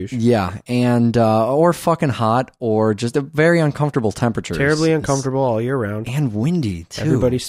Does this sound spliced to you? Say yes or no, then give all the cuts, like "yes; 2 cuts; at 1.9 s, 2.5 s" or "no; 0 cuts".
yes; 1 cut; at 3.5 s